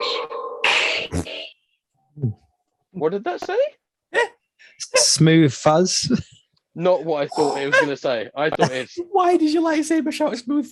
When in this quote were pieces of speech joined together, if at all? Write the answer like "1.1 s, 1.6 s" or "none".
none